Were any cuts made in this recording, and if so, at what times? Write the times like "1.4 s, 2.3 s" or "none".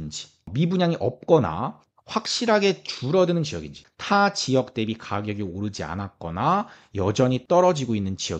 3.8 s